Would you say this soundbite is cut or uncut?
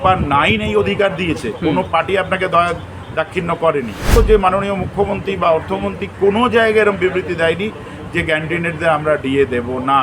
cut